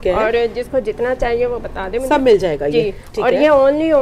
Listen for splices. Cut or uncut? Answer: uncut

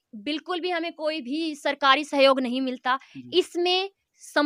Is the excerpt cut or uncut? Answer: uncut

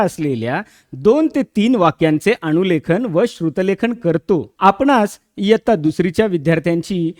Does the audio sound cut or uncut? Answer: cut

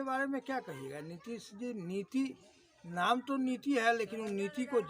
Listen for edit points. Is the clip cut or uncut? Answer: uncut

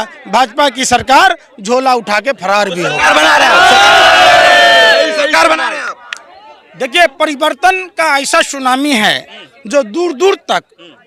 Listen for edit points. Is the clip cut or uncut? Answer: uncut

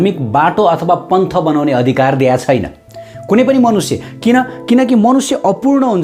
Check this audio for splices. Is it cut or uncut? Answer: uncut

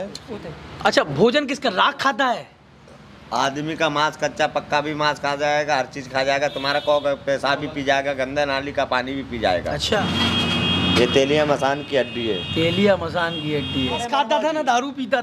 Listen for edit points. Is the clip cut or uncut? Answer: cut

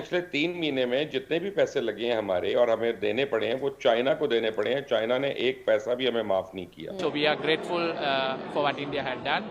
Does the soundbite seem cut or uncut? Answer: cut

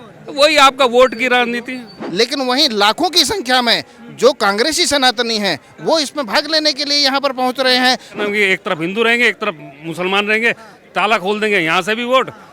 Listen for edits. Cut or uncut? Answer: cut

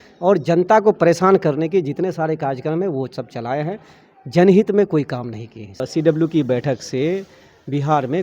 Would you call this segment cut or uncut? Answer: cut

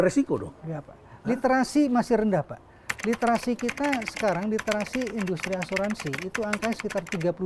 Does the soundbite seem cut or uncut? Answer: uncut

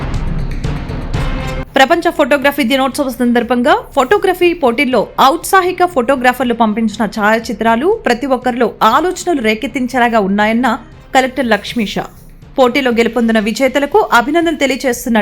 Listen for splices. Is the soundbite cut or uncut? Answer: cut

